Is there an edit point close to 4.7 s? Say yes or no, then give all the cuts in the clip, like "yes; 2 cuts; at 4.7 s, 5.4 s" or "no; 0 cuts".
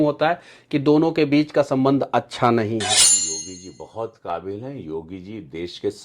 no; 1 cut; at 3.2 s